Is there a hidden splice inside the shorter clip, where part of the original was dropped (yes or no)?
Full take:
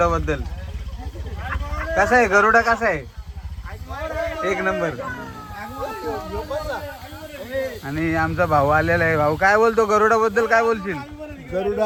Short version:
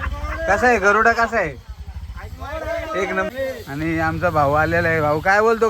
yes